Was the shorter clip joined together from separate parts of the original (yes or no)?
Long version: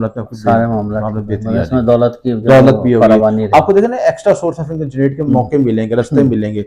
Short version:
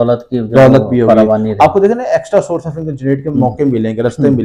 no